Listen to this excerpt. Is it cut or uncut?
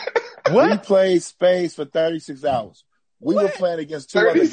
uncut